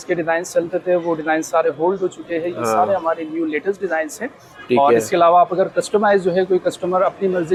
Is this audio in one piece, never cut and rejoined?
yes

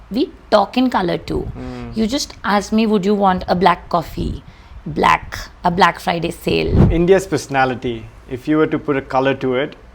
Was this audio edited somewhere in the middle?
yes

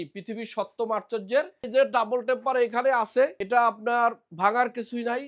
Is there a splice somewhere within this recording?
yes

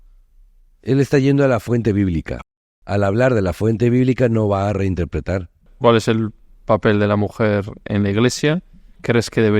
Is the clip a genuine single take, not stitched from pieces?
no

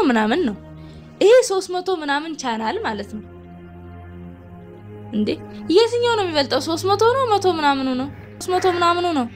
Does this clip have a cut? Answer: yes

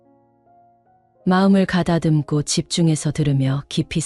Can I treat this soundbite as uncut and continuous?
no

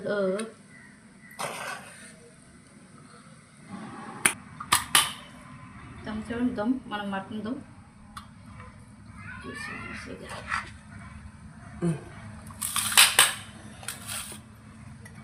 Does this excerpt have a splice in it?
no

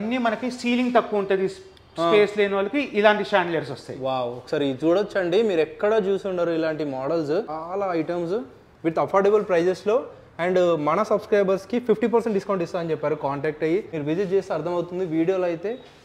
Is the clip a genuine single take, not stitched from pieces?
no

